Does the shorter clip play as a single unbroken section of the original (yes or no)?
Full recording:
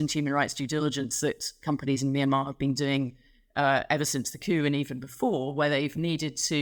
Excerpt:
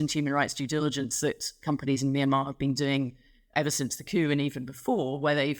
no